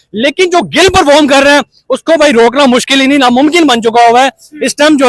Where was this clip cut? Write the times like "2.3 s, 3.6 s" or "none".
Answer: none